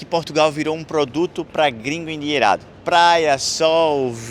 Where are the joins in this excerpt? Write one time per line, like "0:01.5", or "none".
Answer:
none